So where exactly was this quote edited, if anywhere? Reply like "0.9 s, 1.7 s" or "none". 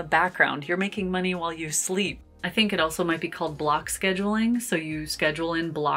2.2 s